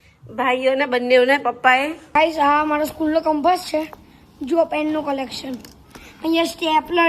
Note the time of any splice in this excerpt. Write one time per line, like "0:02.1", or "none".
0:02.0